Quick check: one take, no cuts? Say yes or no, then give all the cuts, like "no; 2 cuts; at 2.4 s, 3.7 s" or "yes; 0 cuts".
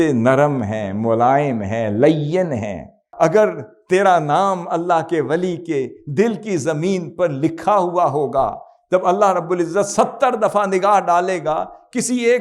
no; 1 cut; at 3.1 s